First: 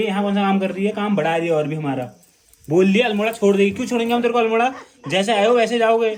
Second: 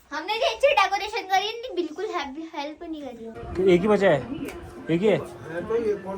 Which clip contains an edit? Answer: second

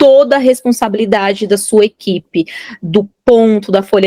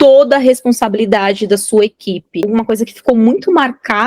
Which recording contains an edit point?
second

